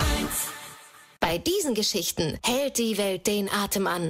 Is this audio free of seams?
no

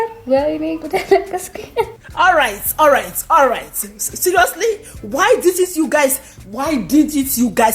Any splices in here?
yes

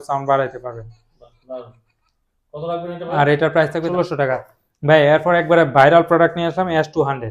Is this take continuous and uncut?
no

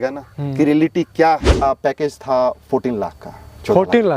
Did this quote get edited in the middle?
yes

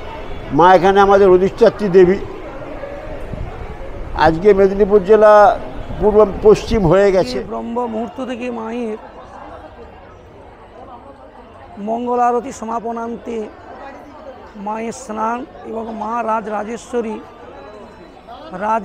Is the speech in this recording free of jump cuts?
no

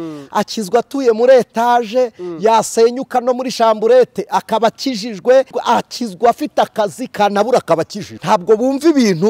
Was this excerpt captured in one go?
no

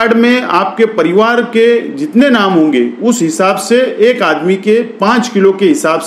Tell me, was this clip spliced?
no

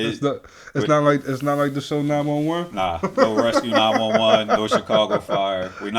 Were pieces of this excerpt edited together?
no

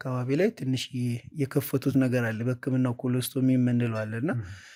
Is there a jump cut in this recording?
no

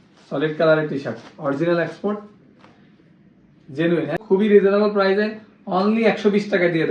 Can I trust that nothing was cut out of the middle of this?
no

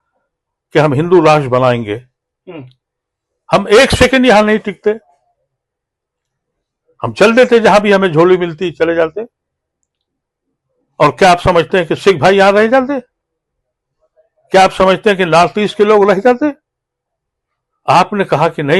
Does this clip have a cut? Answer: no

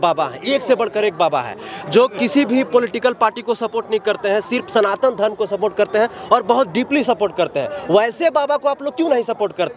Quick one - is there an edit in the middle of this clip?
no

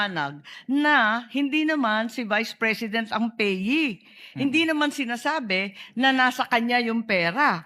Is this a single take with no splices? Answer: yes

